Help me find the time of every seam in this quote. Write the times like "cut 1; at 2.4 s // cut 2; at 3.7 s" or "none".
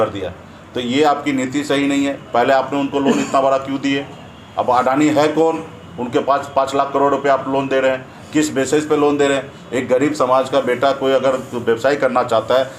none